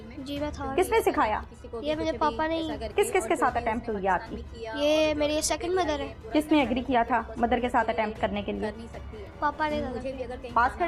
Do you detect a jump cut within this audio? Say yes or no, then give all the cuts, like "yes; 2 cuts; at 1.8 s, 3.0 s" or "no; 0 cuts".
yes; 2 cuts; at 2.9 s, 6.1 s